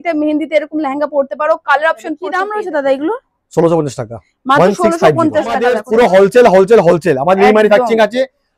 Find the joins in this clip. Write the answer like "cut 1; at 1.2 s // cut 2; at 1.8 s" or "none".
cut 1; at 2.3 s // cut 2; at 5.8 s